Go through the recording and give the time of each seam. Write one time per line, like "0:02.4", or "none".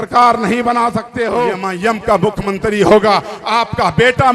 0:01.6

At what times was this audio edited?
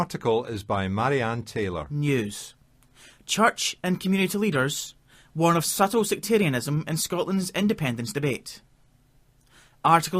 0:01.9

